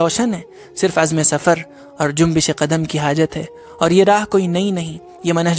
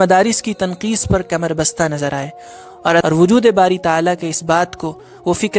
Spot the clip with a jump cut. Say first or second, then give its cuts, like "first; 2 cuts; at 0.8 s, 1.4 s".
second; 1 cut; at 3.0 s